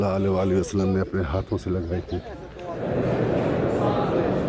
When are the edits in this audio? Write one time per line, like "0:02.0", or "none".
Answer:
0:02.8